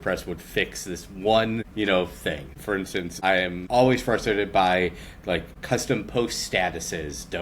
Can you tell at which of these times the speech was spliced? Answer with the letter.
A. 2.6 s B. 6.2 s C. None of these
A